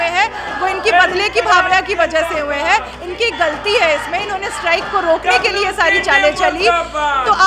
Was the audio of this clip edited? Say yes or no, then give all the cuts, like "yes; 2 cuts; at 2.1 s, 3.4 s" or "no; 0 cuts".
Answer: no; 0 cuts